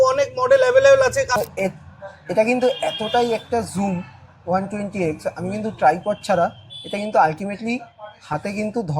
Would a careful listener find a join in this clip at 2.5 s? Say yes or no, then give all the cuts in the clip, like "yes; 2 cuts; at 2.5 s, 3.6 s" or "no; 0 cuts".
no; 1 cut; at 1.3 s